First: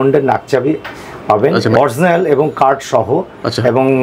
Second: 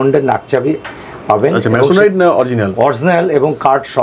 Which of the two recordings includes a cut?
first; 1 cut; at 1.7 s

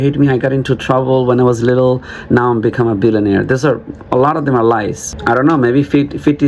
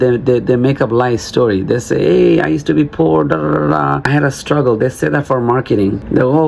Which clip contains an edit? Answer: second; 1 cut; at 4.0 s

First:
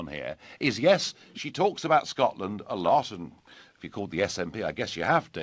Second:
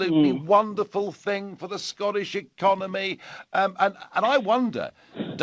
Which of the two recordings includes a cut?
first; 1 cut; at 2.6 s

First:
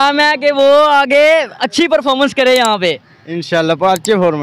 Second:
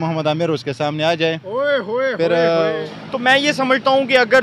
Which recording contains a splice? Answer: second; 1 cut; at 2.8 s

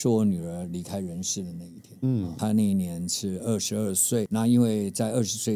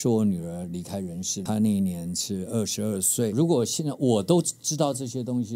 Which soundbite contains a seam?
second; 2 cuts; at 1.4 s, 3.3 s

